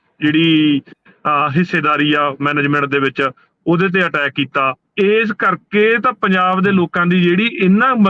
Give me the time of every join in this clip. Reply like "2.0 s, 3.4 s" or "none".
4.8 s